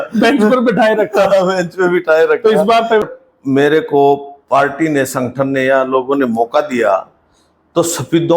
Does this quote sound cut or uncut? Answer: cut